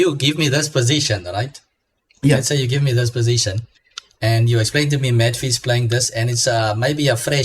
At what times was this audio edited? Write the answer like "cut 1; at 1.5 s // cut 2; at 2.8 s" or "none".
none